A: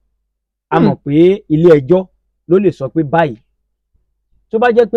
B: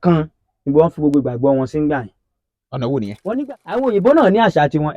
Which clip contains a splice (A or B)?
B